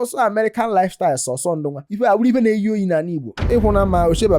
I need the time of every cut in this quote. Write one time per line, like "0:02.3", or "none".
none